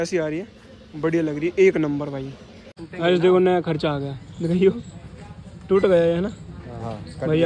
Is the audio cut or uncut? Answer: cut